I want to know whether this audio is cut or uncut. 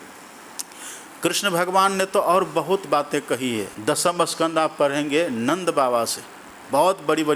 cut